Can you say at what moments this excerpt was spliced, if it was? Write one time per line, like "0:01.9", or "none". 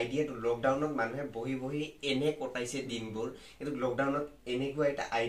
none